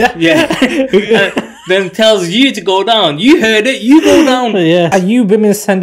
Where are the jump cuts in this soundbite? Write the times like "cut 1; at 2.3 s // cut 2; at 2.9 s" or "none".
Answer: cut 1; at 4.9 s